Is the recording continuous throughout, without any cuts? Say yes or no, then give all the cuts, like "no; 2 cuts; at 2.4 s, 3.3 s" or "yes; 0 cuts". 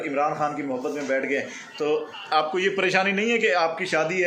yes; 0 cuts